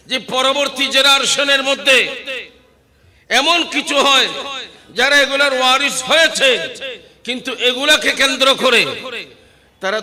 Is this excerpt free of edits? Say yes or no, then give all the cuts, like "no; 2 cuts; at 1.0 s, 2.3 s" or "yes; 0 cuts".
yes; 0 cuts